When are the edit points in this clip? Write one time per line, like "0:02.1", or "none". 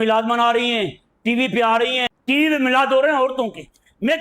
0:02.0